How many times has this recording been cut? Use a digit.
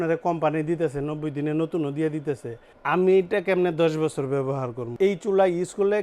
1